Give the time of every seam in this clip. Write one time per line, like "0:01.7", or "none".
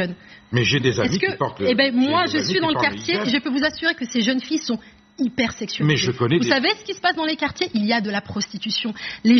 none